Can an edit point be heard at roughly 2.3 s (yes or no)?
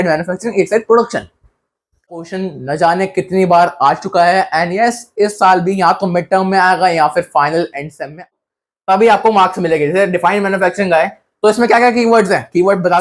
yes